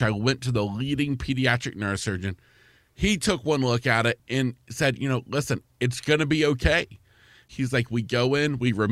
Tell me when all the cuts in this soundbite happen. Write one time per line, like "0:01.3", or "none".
0:04.2
0:07.5